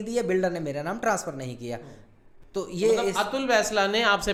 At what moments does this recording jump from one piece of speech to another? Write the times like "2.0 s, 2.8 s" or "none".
none